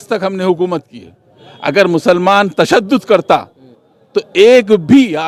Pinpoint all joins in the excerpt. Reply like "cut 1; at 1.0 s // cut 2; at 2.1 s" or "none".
none